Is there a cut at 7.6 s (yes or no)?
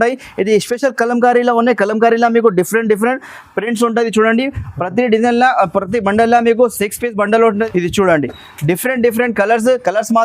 yes